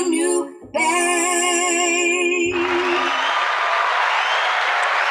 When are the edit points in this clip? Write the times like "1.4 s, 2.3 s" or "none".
3.0 s

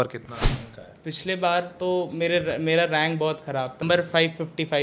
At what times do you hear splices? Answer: 3.8 s

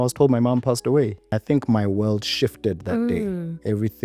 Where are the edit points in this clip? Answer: 1.3 s

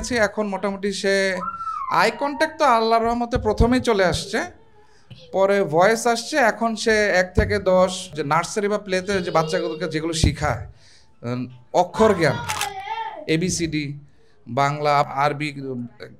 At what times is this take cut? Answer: 15.1 s

